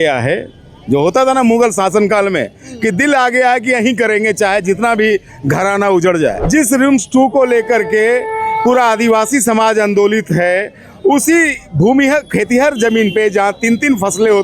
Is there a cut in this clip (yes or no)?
yes